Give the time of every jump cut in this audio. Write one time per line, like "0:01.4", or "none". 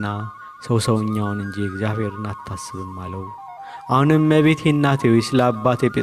none